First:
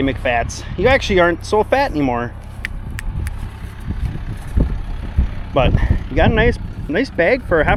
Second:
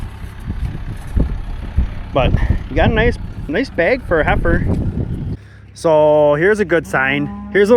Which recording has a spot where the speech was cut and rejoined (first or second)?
second